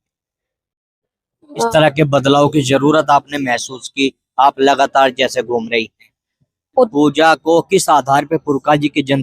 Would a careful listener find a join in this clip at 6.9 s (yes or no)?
yes